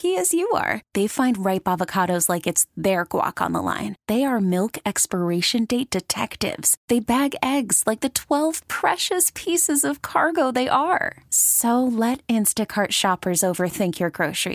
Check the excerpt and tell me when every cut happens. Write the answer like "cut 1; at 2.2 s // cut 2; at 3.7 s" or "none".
none